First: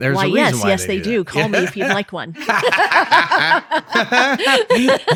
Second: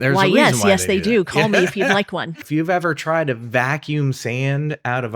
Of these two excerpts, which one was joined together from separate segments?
second; 1 cut; at 2.4 s

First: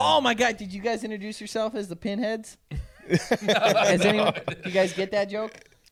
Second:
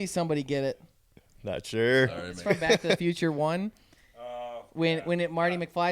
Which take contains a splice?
second; 1 cut; at 2.3 s

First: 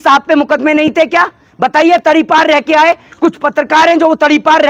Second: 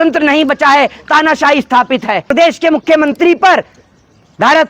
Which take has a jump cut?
second; 1 cut; at 2.3 s

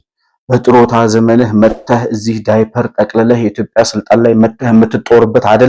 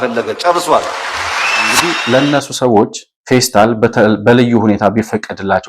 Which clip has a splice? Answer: second; 1 cut; at 1.9 s

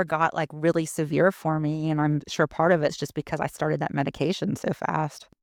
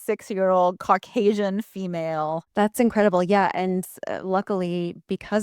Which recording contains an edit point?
second; 1 cut; at 2.4 s

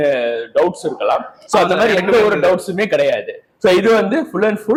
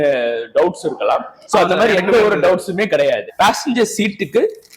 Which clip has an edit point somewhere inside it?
second; 1 cut; at 3.3 s

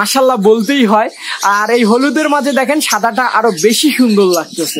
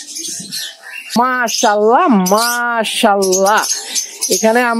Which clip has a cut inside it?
second; 1 cut; at 1.2 s

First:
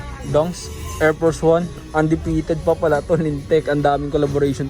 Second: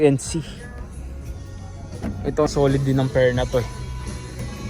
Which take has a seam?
second; 1 cut; at 2.5 s

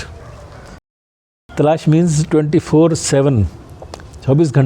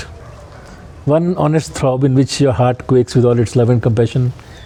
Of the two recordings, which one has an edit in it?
first; 1 cut; at 1.1 s

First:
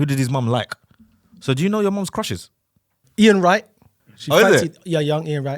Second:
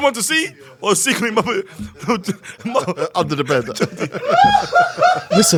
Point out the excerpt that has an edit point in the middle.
first; 1 cut; at 3.0 s

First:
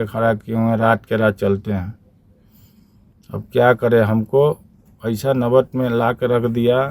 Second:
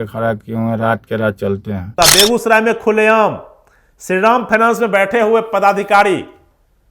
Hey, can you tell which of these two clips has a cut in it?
second; 1 cut; at 2.0 s

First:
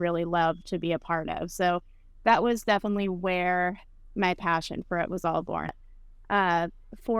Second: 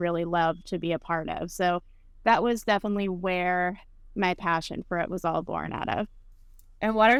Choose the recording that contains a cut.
first; 1 cut; at 5.8 s

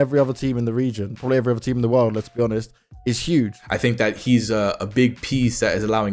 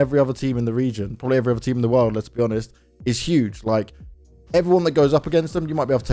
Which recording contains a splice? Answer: first; 1 cut; at 3.6 s

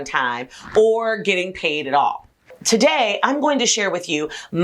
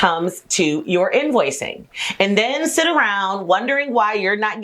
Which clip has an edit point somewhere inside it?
first; 1 cut; at 2.6 s

